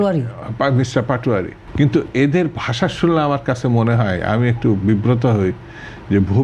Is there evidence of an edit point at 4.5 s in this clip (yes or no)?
no